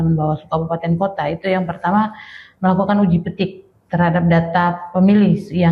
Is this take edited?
no; 0 cuts

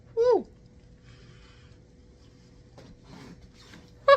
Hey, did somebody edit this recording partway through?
no; 0 cuts

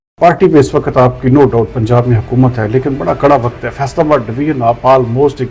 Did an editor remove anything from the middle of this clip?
no; 0 cuts

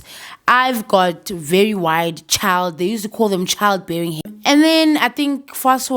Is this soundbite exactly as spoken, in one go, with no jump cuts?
no; 1 cut; at 4.3 s

